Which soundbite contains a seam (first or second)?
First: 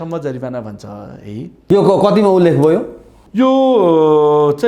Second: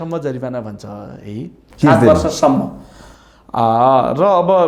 first